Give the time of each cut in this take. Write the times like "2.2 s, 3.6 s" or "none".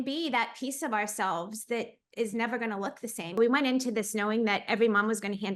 3.4 s

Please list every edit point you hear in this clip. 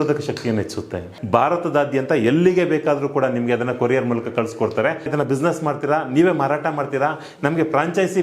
1.1 s, 5.1 s

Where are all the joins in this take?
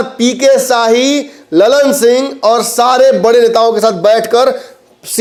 none

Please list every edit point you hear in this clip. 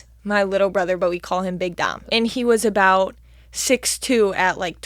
2.0 s

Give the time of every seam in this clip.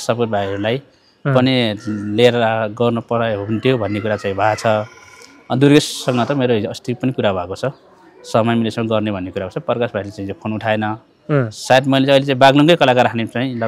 none

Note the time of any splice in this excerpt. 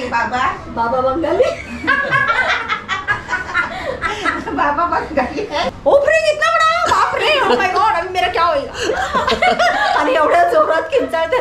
5.7 s

